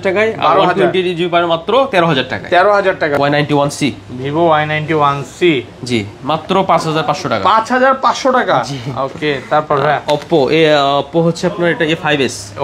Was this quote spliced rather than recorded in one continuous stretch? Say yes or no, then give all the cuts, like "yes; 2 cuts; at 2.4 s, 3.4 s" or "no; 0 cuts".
yes; 1 cut; at 3.1 s